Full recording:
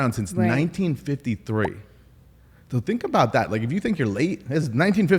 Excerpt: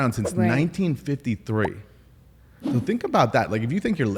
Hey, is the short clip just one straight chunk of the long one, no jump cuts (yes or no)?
yes